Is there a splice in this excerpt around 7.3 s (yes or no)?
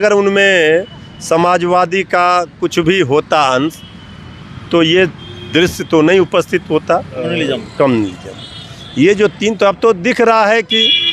yes